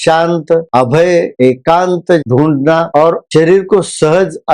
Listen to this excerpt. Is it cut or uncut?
cut